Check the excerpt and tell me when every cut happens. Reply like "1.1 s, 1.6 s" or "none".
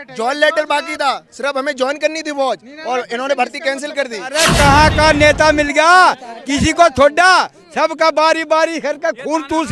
4.4 s